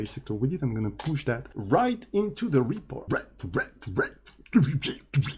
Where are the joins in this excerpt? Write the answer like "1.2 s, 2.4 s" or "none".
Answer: 1.5 s, 3.0 s